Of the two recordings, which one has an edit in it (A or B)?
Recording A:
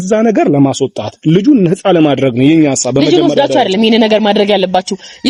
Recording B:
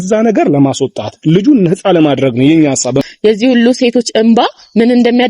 B